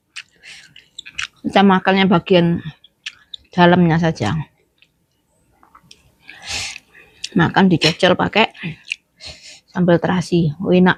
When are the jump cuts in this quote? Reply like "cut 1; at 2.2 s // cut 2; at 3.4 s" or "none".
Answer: none